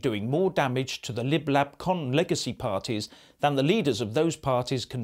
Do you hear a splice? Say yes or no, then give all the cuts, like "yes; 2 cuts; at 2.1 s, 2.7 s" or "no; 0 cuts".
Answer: no; 0 cuts